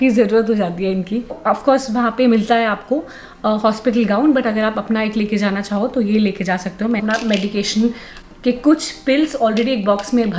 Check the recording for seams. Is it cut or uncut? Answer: cut